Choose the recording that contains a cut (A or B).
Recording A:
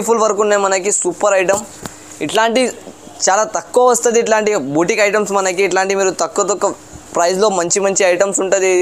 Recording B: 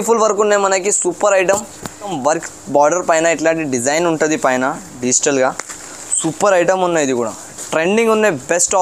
B